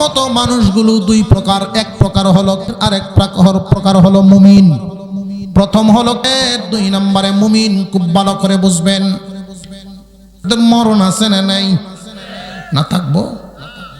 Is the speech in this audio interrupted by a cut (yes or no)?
yes